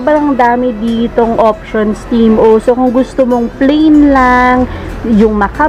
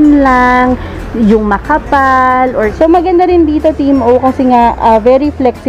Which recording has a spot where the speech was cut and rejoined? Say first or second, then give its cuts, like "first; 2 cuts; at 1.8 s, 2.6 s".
second; 1 cut; at 2.7 s